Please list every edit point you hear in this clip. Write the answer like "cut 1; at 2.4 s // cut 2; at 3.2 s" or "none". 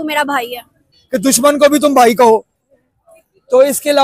cut 1; at 1.0 s